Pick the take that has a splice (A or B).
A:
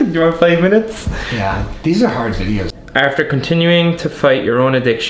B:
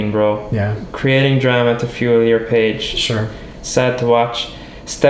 A